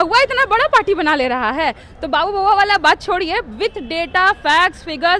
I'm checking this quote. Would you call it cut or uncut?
uncut